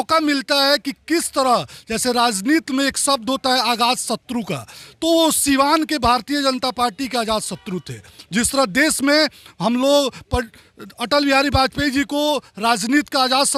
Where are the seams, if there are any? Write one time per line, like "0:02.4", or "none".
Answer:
none